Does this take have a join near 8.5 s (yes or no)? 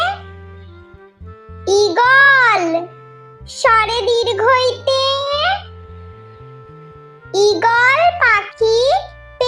no